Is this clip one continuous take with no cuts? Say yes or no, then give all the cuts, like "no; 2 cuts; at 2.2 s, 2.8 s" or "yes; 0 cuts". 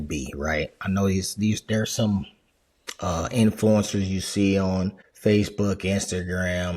no; 1 cut; at 5.0 s